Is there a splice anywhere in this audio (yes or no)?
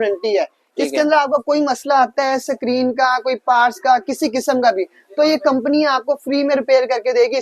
no